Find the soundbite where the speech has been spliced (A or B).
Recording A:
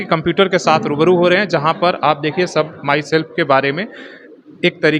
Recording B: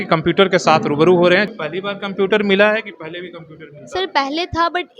B